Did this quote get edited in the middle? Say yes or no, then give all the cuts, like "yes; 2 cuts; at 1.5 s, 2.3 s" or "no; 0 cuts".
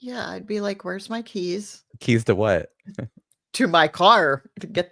yes; 1 cut; at 1.9 s